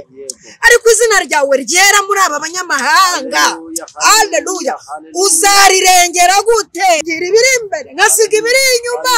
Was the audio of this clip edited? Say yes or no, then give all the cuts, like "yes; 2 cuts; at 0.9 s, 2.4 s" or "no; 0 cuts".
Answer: yes; 1 cut; at 7.0 s